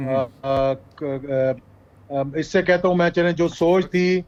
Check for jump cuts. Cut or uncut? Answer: uncut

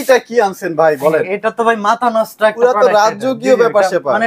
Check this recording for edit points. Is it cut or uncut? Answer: uncut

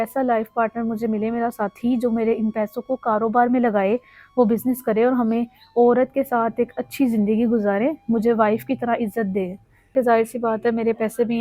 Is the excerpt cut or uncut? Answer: cut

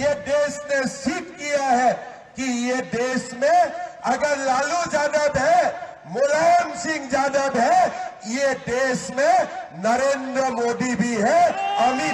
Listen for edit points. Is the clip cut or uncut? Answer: uncut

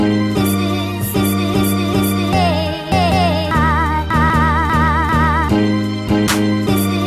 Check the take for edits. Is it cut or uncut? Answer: uncut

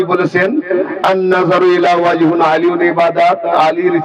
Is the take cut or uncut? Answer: uncut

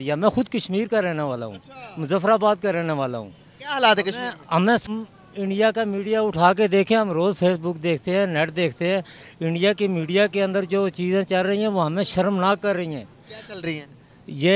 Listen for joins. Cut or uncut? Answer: cut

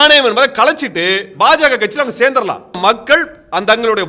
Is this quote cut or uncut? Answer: cut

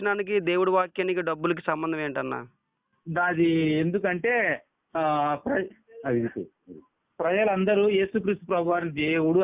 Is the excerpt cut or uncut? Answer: uncut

